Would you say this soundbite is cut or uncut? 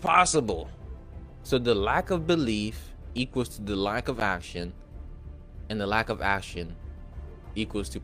uncut